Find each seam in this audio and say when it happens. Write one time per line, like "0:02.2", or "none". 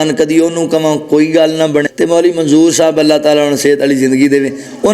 0:01.9